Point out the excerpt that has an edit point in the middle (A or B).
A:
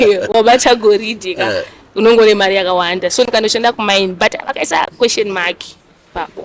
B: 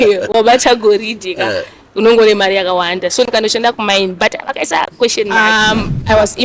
B